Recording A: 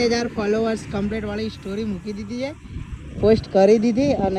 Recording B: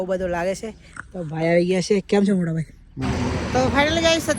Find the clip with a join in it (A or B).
B